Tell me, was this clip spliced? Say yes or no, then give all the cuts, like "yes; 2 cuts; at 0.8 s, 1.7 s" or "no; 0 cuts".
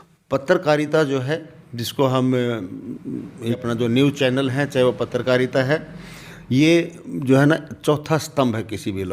yes; 1 cut; at 3.6 s